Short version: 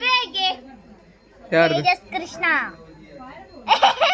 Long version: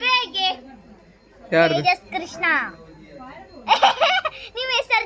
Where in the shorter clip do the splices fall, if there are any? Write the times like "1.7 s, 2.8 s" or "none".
none

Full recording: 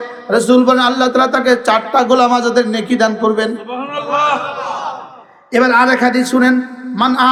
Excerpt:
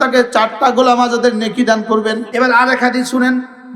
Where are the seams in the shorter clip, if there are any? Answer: 2.2 s

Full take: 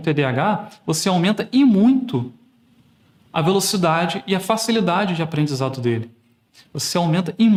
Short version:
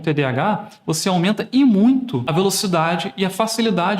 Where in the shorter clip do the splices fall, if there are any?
2.3 s

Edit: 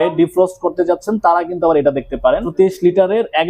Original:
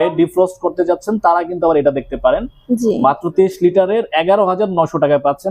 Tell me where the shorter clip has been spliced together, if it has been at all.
2.5 s

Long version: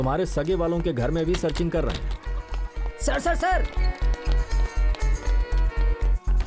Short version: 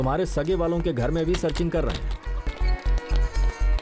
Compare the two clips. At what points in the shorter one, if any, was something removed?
2.6 s

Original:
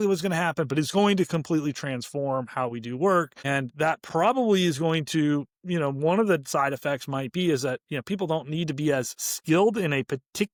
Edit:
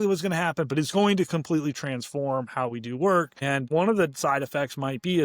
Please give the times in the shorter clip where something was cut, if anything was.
3.6 s

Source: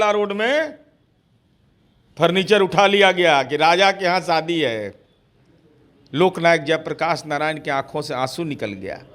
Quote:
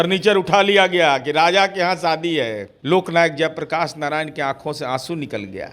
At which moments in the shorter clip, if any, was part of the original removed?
2.7 s

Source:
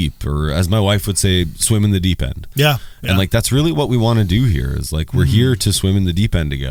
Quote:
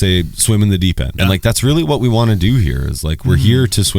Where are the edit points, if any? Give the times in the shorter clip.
1.1 s

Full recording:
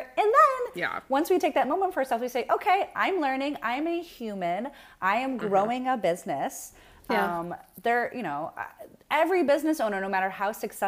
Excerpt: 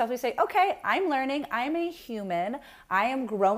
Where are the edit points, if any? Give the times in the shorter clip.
none

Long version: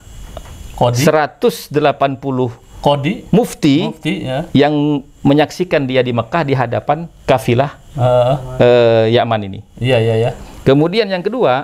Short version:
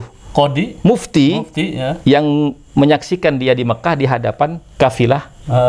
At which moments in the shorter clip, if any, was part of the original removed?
none

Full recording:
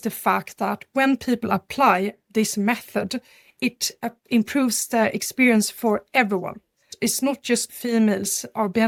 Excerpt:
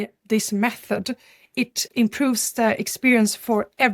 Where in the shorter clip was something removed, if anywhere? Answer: 1.8 s

